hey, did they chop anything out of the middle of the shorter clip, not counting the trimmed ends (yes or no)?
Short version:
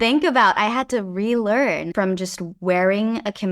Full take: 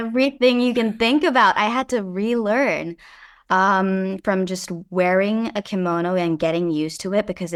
yes